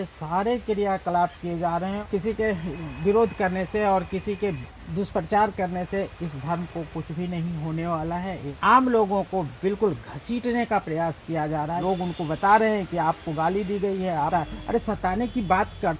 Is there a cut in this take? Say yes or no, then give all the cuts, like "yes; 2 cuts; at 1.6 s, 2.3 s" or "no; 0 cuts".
yes; 4 cuts; at 2.0 s, 8.5 s, 11.8 s, 14.3 s